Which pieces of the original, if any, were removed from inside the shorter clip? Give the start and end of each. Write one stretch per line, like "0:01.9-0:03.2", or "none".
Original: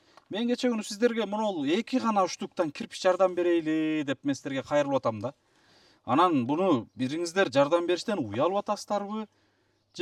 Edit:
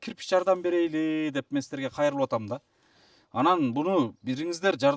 none